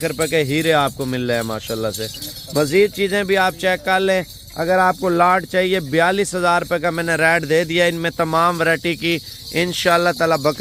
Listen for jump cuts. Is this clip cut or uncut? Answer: uncut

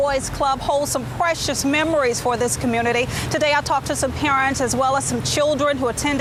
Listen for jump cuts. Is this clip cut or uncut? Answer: uncut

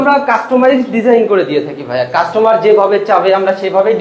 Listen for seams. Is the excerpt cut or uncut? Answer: uncut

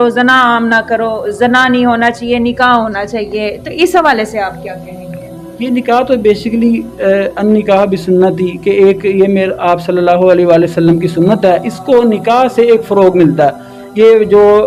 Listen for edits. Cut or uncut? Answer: uncut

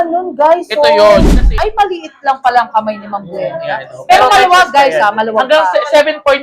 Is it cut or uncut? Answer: cut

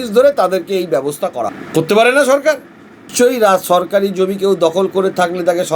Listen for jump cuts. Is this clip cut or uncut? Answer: cut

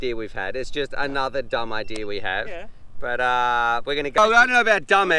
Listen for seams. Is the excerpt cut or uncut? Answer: cut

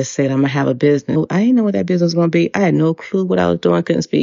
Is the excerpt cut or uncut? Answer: uncut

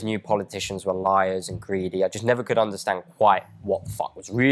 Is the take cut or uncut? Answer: uncut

